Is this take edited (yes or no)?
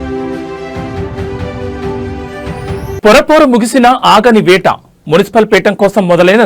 yes